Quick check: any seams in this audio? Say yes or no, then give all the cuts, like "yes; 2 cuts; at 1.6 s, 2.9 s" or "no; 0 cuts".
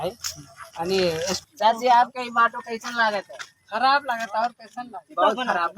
yes; 1 cut; at 1.4 s